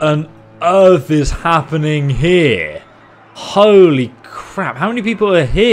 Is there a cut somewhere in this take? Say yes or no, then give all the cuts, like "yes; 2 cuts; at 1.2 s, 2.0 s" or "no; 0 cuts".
no; 0 cuts